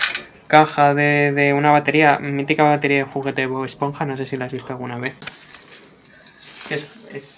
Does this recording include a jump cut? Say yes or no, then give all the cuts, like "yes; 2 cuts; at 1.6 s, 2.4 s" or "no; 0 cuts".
yes; 1 cut; at 5.3 s